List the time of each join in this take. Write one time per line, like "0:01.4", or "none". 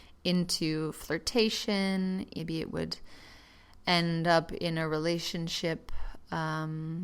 0:02.4